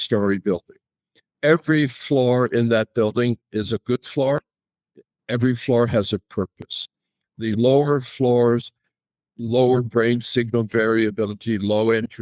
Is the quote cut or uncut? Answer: uncut